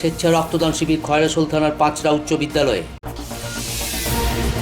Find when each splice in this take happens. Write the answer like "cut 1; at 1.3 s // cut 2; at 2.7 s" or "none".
cut 1; at 3.0 s